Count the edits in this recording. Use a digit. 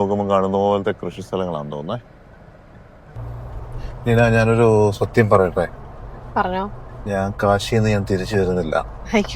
1